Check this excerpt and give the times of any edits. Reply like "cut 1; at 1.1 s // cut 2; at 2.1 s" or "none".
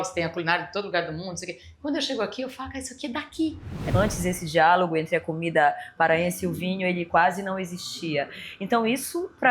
cut 1; at 3.8 s